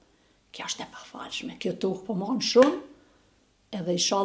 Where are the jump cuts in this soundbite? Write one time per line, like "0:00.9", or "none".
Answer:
none